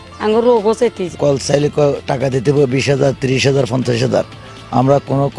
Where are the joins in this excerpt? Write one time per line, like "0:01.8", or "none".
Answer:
0:01.1